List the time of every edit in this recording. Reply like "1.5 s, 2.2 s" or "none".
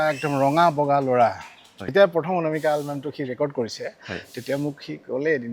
1.8 s